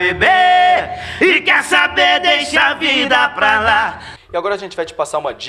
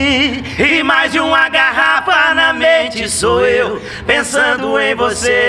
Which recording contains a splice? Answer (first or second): first